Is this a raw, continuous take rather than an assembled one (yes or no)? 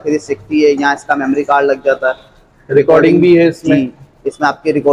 yes